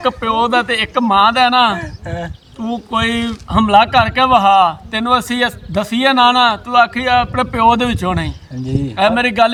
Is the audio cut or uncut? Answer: uncut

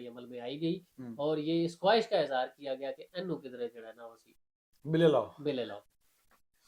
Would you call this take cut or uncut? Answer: uncut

